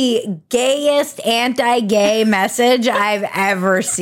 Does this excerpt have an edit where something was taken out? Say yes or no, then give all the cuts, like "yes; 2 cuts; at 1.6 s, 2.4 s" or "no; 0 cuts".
no; 0 cuts